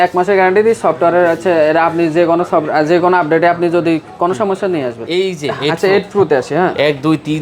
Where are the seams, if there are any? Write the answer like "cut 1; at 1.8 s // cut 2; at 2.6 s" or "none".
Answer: cut 1; at 5.1 s